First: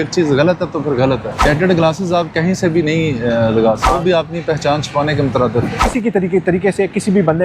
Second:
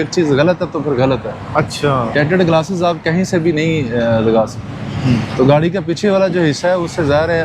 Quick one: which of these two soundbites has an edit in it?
first; 3 cuts; at 1.4 s, 3.9 s, 5.8 s

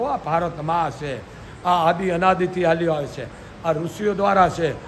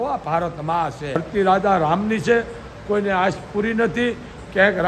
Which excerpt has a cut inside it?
second; 1 cut; at 1.2 s

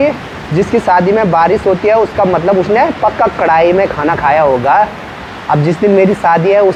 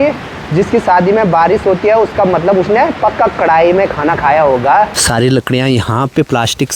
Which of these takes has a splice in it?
second; 1 cut; at 5.0 s

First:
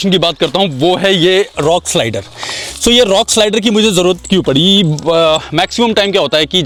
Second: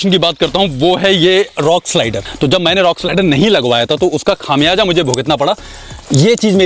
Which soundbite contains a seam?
second; 1 cut; at 2.2 s

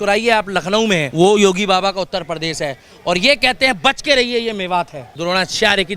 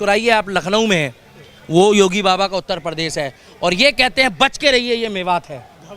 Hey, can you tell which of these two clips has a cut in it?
first; 2 cuts; at 1.1 s, 5.1 s

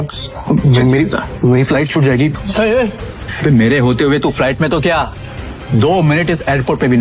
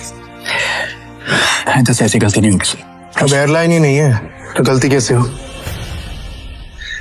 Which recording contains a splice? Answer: first; 2 cuts; at 2.3 s, 3.2 s

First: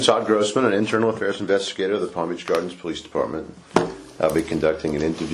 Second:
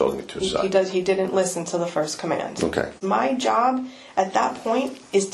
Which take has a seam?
second; 1 cut; at 3.0 s

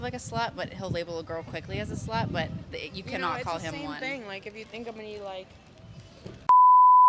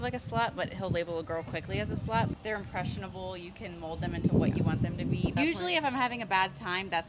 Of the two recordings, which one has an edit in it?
second; 2 cuts; at 2.3 s, 5.3 s

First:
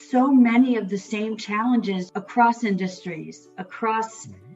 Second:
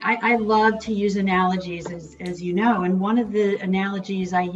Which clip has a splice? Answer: first; 1 cut; at 2.1 s

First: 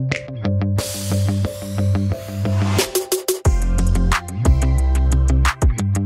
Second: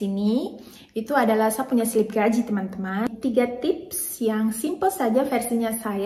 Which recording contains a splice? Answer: second; 1 cut; at 3.1 s

